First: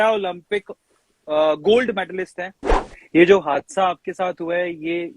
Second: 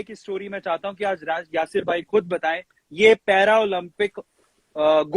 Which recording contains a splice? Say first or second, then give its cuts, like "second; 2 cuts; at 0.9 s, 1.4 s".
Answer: first; 1 cut; at 2.8 s